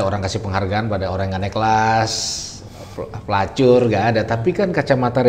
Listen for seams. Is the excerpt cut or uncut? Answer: uncut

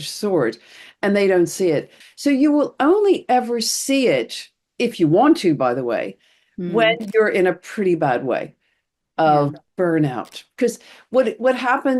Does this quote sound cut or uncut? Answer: cut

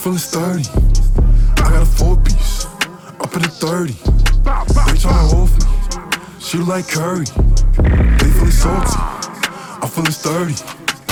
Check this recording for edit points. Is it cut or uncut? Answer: uncut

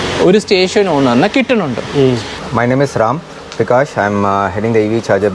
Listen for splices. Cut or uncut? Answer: cut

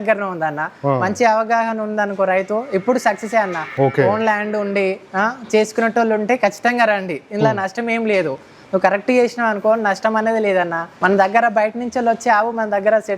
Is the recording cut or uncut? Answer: cut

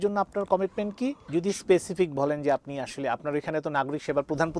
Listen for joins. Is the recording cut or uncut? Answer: cut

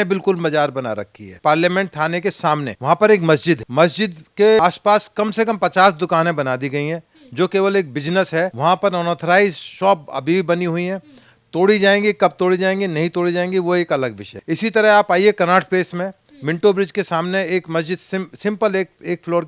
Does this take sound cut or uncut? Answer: cut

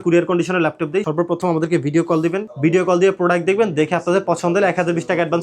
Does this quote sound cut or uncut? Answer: cut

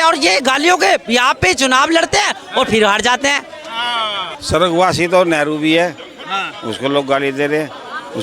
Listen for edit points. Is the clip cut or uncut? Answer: cut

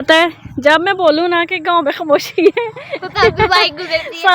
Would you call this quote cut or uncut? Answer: uncut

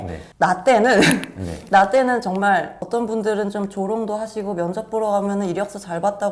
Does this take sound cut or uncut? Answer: cut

